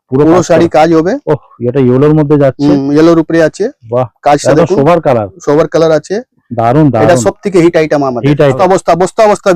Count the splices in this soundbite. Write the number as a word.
one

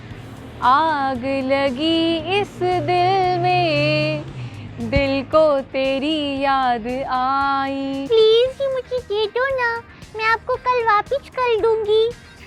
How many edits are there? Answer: one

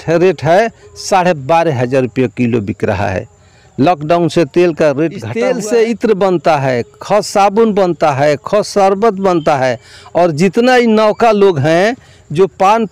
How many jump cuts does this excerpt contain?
one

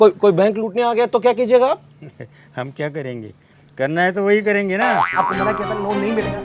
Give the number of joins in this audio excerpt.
one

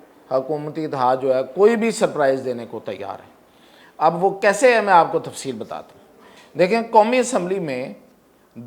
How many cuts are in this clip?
zero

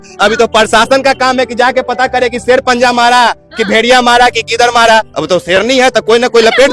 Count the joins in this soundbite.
one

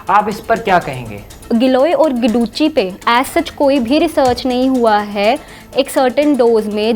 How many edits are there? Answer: one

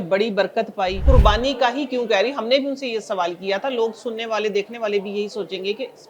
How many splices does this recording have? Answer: one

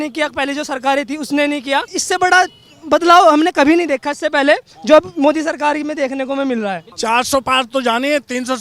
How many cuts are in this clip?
two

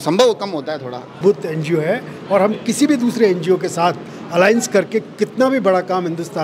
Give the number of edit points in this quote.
one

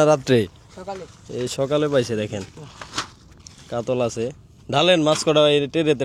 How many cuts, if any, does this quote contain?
zero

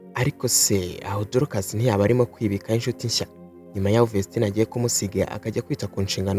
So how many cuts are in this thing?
zero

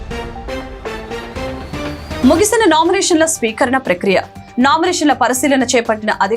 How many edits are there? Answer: zero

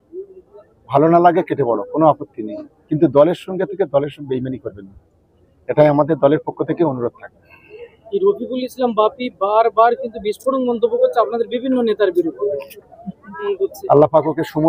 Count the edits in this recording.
one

